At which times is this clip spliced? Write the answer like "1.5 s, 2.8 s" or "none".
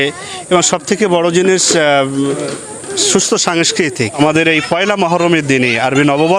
4.2 s